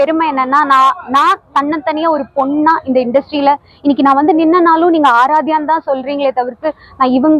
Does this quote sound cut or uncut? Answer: uncut